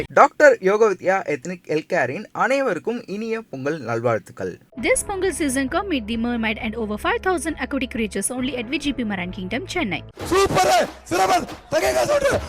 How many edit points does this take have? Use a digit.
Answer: 1